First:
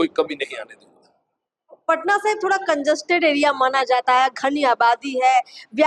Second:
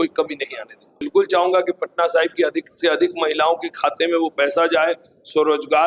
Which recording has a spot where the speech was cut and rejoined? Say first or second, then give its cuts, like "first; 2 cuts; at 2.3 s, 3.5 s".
second; 1 cut; at 1.0 s